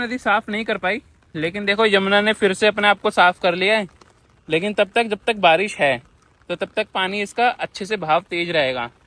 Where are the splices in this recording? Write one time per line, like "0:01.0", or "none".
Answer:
none